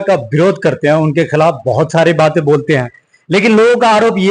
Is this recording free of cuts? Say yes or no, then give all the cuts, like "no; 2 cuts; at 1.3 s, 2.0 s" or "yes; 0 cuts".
yes; 0 cuts